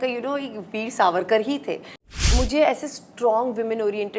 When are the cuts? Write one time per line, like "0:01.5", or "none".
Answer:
0:02.0